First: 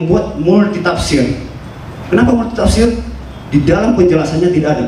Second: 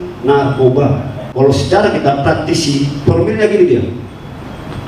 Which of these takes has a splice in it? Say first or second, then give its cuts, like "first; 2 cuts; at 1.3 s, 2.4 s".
second; 1 cut; at 1.2 s